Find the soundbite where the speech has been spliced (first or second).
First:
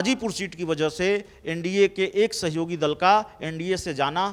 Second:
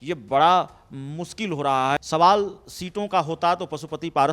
second